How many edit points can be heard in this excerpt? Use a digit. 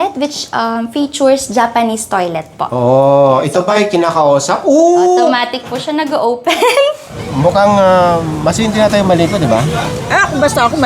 1